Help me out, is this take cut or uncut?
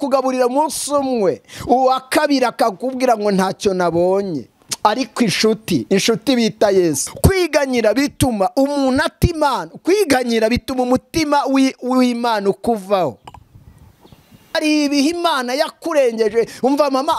cut